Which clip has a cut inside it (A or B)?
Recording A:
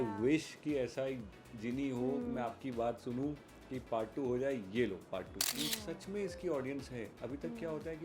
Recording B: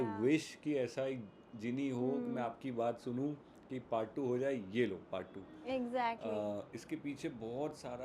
A